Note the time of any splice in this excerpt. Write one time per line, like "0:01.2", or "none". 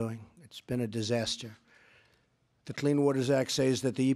0:03.3